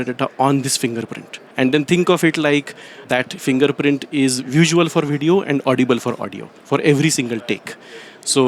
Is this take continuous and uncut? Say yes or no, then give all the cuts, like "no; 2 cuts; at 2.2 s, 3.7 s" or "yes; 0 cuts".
no; 2 cuts; at 1.5 s, 3.0 s